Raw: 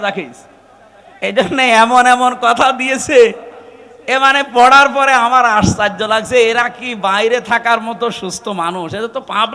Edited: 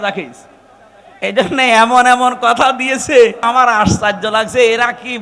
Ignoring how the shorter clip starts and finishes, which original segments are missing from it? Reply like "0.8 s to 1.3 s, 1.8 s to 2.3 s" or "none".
3.5 s to 5.2 s